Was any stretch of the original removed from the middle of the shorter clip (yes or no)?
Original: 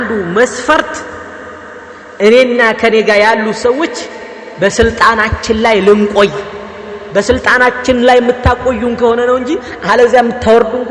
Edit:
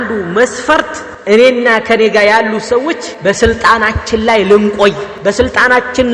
yes